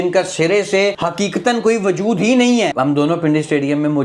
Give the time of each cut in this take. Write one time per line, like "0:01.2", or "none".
0:01.0
0:02.7